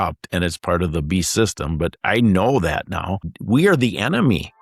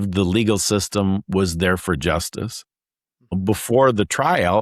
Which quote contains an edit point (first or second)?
first